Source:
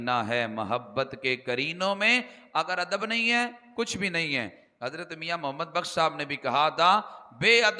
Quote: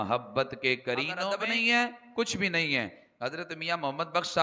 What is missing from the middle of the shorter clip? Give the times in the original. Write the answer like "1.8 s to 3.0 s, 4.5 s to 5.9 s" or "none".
1.8 s to 2.8 s